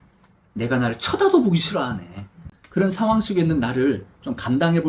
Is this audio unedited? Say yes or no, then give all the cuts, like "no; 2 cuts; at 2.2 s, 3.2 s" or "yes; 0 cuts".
no; 1 cut; at 2.6 s